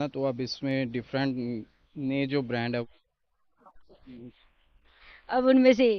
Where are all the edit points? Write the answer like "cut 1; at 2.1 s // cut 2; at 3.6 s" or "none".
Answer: cut 1; at 2.8 s